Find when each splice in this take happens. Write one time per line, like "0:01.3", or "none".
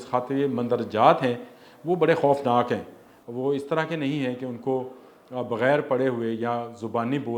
none